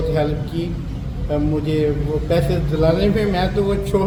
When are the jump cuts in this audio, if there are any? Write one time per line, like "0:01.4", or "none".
none